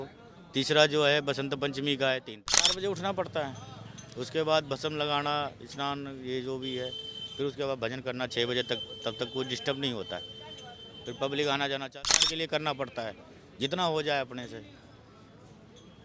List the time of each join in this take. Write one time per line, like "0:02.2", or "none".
0:02.5
0:12.1